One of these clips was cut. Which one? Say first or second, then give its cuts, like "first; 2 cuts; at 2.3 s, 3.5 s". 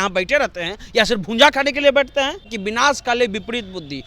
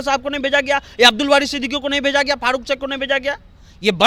first; 1 cut; at 2.5 s